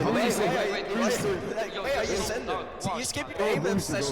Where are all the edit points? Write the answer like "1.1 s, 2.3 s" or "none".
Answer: 2.7 s